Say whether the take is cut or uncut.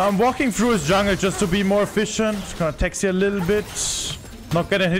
uncut